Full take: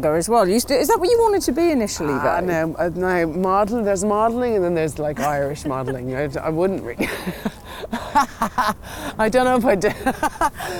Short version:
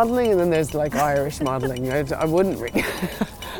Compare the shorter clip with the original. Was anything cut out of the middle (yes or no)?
no